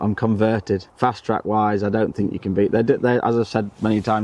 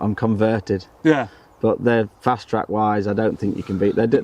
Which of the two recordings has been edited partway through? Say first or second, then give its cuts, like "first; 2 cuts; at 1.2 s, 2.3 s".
first; 1 cut; at 0.9 s